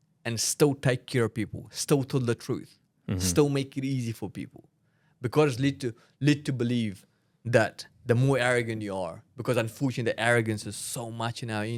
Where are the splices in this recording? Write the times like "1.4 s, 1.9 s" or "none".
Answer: none